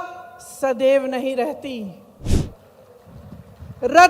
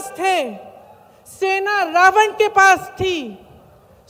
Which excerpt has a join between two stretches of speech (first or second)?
first